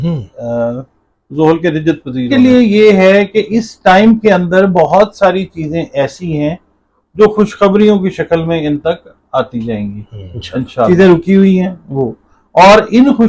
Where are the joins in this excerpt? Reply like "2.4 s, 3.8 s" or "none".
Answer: 2.3 s, 10.9 s